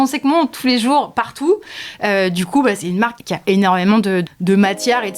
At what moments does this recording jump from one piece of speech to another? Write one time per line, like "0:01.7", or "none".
0:03.2
0:04.3